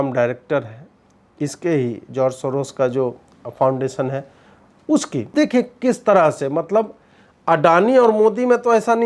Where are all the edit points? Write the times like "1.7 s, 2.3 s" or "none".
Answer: 5.3 s